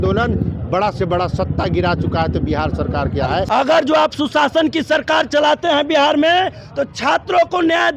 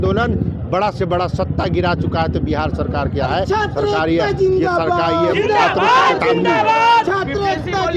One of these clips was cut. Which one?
first; 1 cut; at 3.4 s

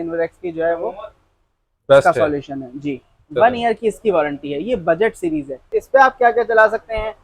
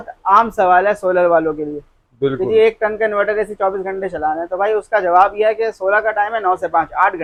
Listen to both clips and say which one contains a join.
first; 1 cut; at 5.9 s

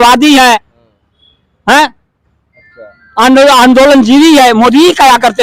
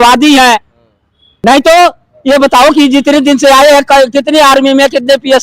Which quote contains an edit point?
second; 1 cut; at 1.4 s

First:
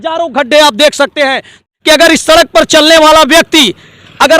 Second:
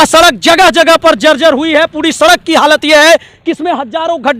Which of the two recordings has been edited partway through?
first; 1 cut; at 1.6 s

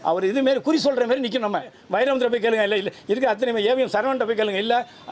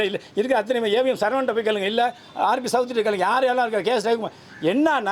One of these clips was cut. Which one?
first; 1 cut; at 1.8 s

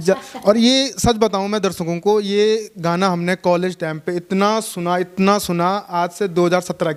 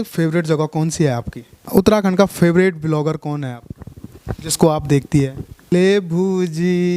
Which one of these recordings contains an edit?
second; 2 cuts; at 1.5 s, 5.6 s

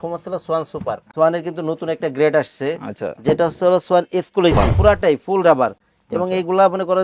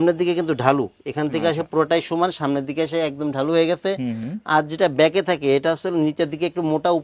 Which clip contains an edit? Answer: first; 2 cuts; at 1.1 s, 4.7 s

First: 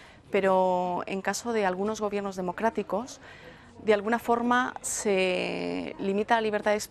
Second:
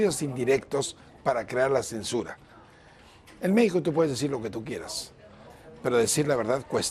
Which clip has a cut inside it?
second; 1 cut; at 1.0 s

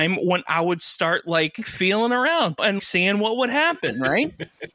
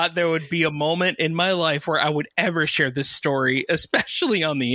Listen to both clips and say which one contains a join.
first; 2 cuts; at 1.7 s, 2.8 s

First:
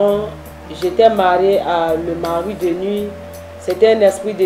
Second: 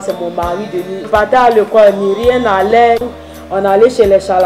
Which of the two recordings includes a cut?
second; 2 cuts; at 1.1 s, 3.0 s

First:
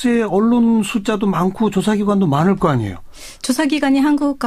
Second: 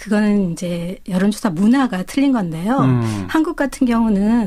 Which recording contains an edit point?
second; 1 cut; at 1.2 s

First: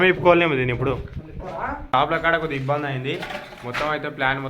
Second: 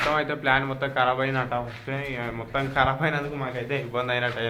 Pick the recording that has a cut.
first; 1 cut; at 1.9 s

